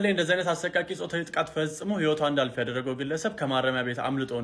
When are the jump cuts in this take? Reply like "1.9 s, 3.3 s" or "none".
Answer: none